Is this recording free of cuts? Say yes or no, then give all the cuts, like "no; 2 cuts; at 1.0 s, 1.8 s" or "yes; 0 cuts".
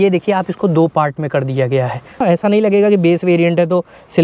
no; 1 cut; at 2.2 s